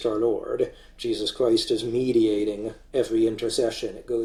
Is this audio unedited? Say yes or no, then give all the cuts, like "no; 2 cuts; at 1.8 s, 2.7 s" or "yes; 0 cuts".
yes; 0 cuts